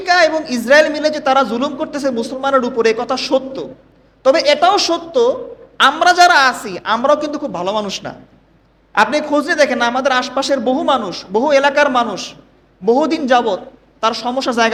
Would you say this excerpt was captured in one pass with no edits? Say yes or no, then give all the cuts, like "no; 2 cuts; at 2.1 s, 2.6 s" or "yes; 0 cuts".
yes; 0 cuts